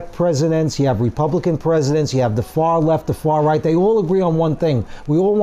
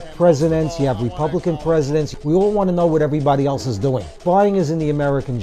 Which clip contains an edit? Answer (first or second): second